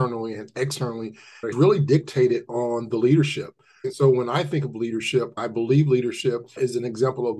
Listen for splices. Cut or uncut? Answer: cut